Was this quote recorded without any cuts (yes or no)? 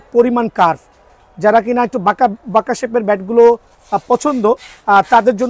yes